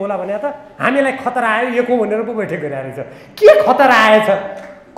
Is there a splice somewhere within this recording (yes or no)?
no